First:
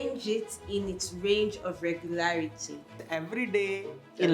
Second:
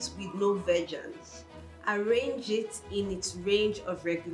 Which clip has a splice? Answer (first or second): first